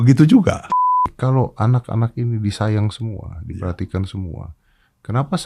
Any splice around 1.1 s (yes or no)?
yes